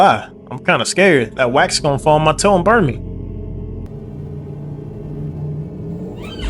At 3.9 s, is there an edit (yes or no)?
yes